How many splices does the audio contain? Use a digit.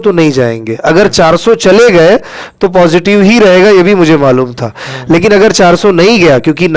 0